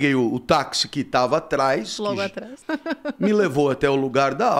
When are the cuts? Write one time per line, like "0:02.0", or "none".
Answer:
0:02.6